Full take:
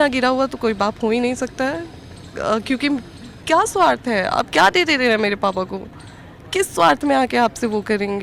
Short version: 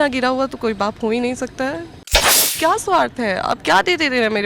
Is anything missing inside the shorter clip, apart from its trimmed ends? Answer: yes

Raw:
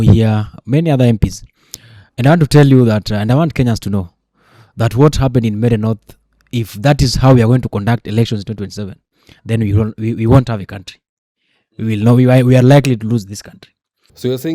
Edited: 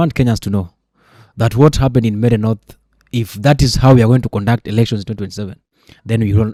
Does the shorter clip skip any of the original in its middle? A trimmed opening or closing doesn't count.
no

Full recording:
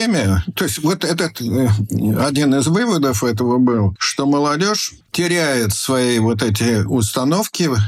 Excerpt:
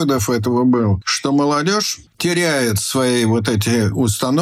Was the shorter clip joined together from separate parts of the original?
no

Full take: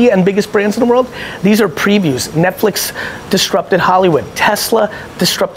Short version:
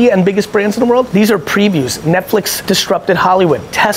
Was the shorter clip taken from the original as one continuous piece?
no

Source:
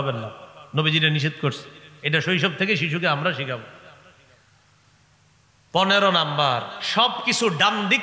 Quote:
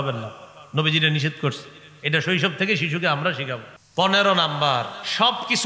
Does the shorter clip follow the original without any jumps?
no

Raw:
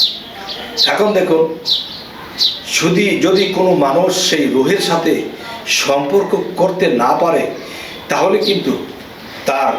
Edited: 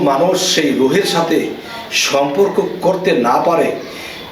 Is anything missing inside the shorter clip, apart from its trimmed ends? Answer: no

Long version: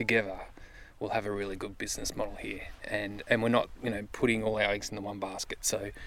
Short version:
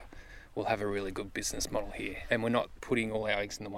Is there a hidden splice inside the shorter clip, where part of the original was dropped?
yes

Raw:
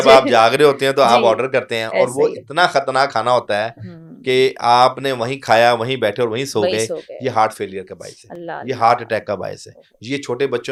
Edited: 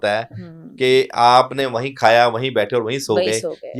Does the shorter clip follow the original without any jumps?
yes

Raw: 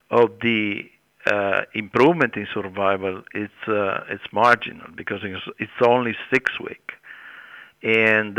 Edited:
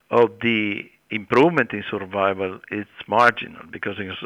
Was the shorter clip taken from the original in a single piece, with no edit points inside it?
no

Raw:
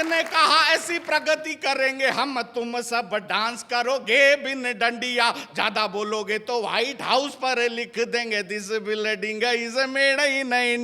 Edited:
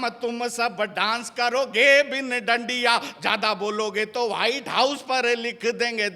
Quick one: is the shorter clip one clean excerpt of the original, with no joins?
yes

